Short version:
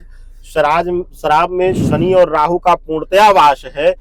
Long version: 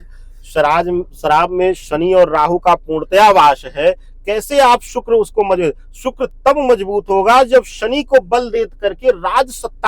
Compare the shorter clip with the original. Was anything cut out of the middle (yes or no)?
no